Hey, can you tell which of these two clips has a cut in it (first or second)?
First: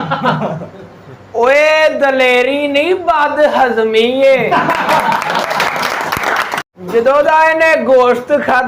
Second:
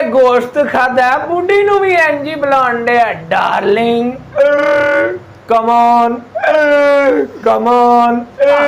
first